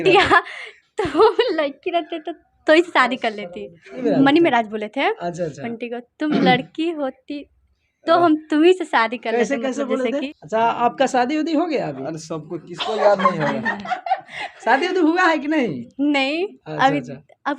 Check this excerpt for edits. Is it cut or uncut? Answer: cut